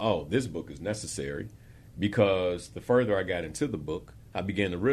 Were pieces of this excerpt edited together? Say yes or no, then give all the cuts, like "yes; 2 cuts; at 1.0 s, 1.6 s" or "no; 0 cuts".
no; 0 cuts